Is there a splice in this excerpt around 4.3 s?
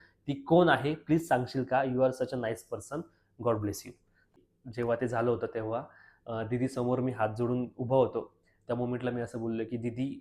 yes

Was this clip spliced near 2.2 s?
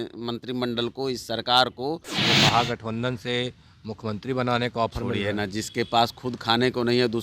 yes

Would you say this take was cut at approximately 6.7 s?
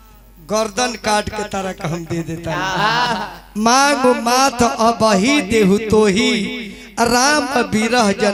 no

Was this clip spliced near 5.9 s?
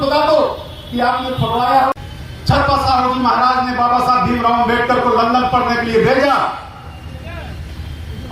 no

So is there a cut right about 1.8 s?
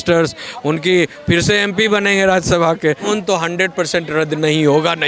no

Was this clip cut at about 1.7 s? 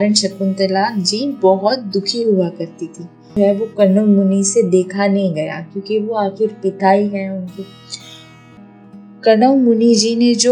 no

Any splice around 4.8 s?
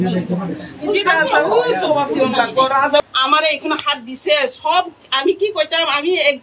no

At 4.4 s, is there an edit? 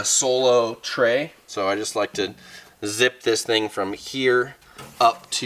no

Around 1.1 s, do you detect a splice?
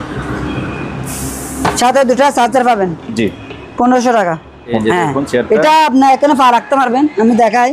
no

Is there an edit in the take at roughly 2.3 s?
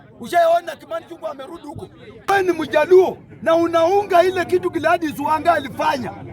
yes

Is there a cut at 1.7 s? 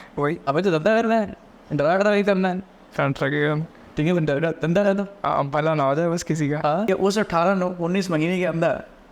no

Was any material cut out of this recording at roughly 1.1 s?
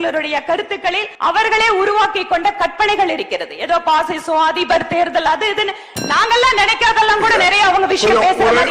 yes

